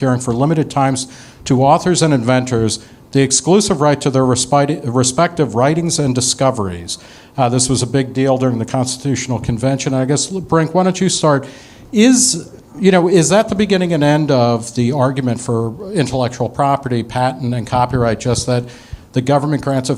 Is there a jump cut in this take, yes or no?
no